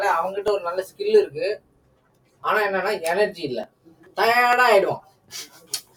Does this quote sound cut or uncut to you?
uncut